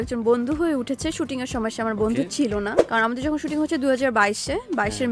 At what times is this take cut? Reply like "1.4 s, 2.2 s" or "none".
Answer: 2.8 s